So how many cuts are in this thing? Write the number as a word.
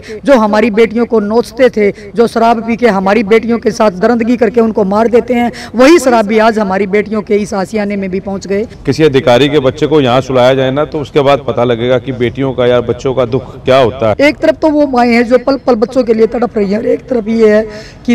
two